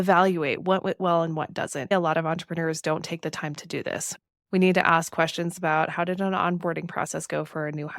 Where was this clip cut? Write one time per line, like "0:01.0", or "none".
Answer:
0:01.9
0:04.2